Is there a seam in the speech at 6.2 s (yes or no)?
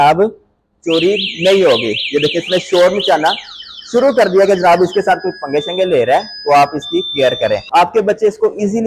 no